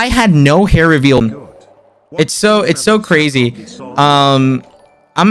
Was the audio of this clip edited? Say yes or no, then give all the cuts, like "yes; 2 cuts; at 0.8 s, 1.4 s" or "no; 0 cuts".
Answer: yes; 1 cut; at 1.2 s